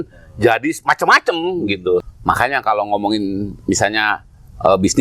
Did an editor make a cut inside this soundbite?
yes; 1 cut; at 2.1 s

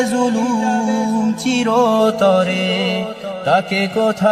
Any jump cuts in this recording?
no; 0 cuts

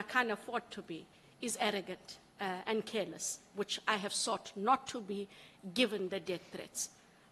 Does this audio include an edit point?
no; 0 cuts

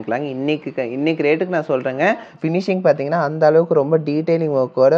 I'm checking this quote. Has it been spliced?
yes; 1 cut; at 2.3 s

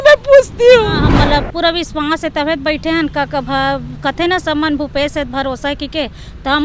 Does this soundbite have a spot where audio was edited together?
yes; 1 cut; at 1.1 s

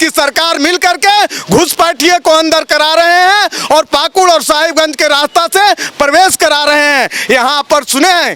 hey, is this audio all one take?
yes; 0 cuts

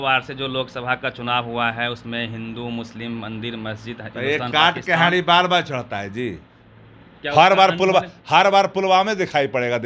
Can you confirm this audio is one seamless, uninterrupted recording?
yes; 0 cuts

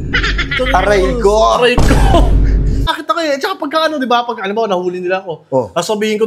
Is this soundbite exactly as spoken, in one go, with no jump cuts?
no; 1 cut; at 2.9 s

